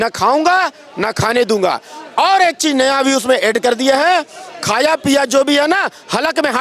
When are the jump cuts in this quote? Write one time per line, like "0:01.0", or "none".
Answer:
none